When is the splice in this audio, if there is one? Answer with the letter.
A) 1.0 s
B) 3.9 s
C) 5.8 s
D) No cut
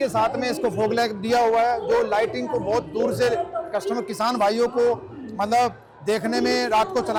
D